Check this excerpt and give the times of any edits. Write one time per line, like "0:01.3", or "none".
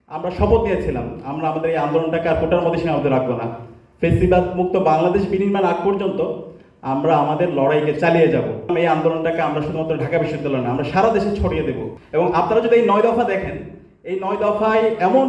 0:08.7
0:11.9